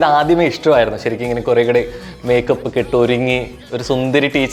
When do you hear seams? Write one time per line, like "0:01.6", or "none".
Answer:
none